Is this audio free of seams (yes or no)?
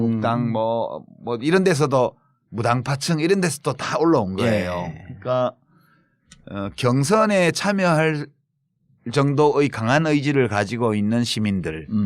no